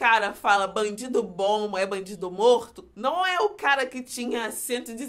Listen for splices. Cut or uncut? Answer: cut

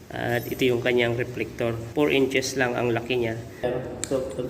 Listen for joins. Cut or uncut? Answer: cut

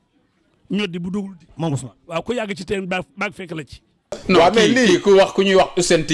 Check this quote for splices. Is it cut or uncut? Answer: cut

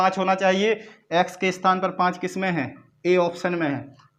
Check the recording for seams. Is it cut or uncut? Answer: uncut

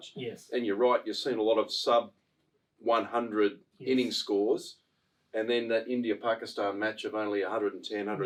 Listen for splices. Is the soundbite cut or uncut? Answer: uncut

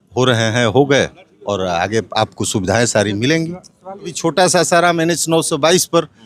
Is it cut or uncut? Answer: cut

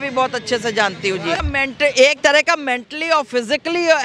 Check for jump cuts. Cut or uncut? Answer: cut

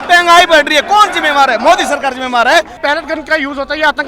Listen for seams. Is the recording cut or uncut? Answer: cut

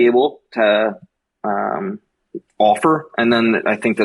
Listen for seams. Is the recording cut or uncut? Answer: uncut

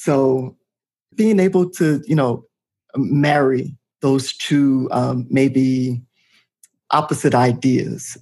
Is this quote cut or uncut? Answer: cut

